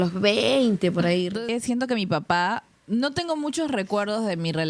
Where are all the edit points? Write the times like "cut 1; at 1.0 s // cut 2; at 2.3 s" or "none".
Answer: cut 1; at 1.3 s // cut 2; at 2.7 s